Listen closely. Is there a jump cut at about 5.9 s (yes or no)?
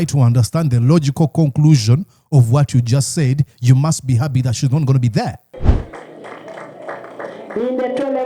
yes